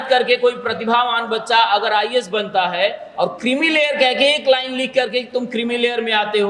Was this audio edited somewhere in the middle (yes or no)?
no